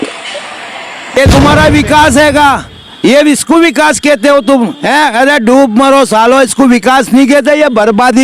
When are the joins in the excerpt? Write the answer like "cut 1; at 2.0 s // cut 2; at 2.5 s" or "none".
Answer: cut 1; at 1.2 s